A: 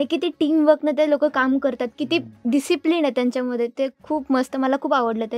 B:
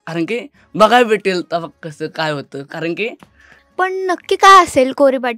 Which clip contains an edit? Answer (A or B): B